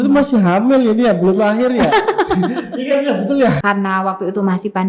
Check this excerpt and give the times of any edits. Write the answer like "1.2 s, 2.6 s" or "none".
3.6 s